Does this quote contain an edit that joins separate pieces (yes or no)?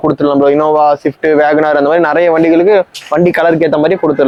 no